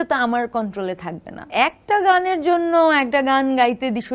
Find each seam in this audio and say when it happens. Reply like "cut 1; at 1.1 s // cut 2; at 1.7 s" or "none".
cut 1; at 1.4 s